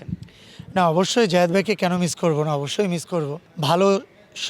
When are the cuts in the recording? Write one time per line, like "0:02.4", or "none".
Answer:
0:03.4